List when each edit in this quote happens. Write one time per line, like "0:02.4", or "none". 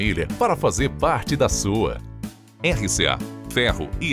none